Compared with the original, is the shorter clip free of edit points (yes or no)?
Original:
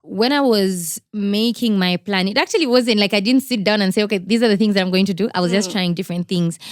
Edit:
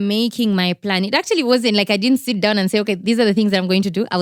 yes